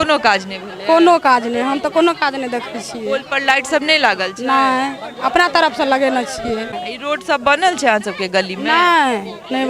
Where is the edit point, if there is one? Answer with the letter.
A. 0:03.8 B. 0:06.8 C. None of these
B